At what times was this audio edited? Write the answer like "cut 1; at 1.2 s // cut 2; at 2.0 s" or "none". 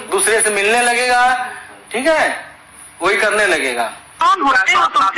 cut 1; at 4.2 s